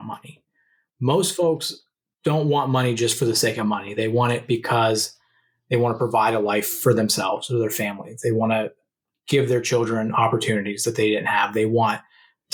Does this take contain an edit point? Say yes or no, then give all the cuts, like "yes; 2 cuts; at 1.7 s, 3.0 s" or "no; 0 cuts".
no; 0 cuts